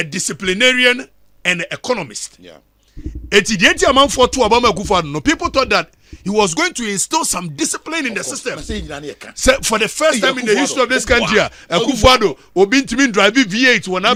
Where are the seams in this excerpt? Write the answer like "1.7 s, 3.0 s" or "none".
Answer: none